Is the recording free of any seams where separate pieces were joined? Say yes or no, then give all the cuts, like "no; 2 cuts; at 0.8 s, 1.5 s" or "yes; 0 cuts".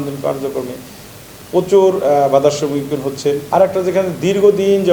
no; 1 cut; at 3.4 s